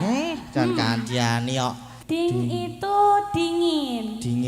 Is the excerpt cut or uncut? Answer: cut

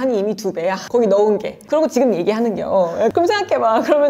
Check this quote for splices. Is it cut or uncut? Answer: cut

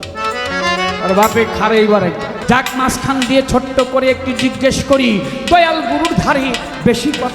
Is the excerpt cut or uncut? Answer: cut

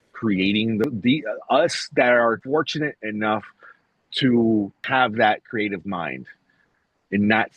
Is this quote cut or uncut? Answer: cut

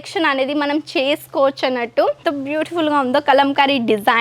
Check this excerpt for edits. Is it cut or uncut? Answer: cut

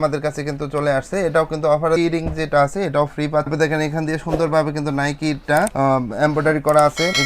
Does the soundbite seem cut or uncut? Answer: cut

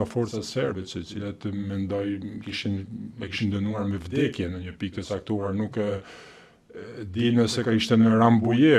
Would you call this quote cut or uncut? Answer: uncut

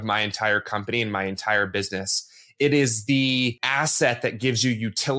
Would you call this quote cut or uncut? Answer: cut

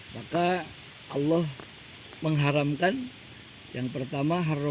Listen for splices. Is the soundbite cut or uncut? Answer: uncut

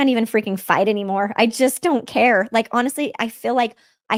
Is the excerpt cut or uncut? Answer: uncut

